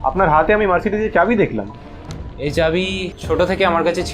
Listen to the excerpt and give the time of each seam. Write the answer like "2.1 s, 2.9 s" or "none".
3.2 s